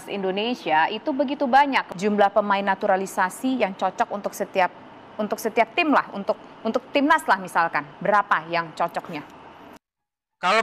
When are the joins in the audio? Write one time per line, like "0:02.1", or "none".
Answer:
0:01.9
0:09.7